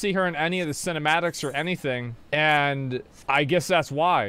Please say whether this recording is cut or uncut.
cut